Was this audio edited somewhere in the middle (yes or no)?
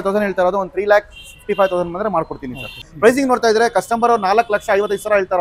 yes